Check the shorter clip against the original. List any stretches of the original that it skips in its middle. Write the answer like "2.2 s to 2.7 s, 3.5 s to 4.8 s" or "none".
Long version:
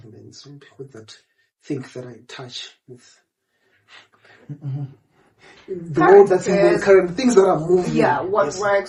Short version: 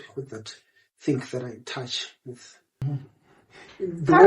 3.4 s to 4.7 s